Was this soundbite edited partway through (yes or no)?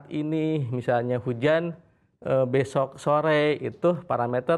no